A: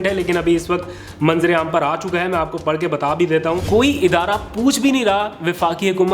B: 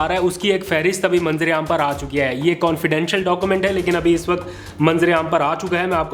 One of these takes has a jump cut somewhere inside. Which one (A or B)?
A